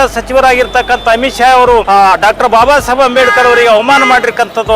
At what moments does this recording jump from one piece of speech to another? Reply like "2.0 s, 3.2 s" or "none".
1.9 s